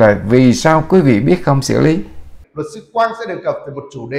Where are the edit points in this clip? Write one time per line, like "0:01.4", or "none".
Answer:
0:02.4